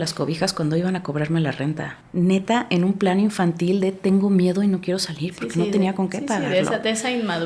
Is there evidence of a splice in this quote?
no; 0 cuts

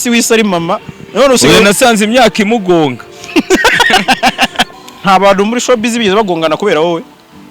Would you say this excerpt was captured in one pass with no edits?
no; 1 cut; at 4.7 s

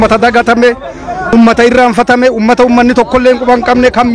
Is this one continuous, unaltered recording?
no; 1 cut; at 1.3 s

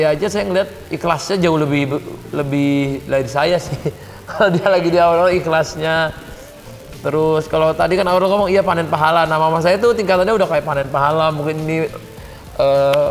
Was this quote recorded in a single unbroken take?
yes; 0 cuts

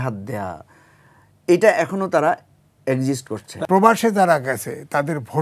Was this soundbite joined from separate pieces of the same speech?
yes; 1 cut; at 3.6 s

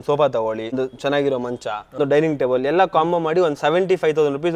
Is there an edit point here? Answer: yes; 2 cuts; at 0.7 s, 2.0 s

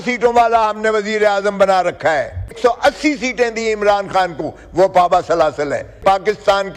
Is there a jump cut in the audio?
yes; 2 cuts; at 2.6 s, 6.0 s

